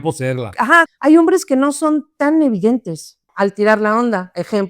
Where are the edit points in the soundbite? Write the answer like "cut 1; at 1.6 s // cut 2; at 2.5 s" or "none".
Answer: cut 1; at 0.9 s // cut 2; at 3.3 s